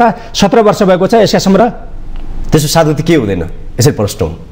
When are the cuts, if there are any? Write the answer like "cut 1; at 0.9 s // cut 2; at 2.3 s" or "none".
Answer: cut 1; at 1.6 s